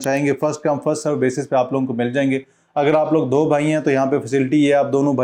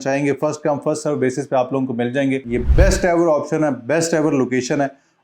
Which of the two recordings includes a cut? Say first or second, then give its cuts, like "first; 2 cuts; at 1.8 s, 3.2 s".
second; 1 cut; at 2.5 s